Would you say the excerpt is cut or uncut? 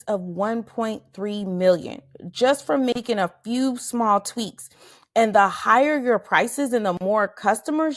uncut